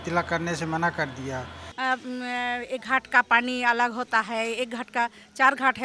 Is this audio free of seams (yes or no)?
no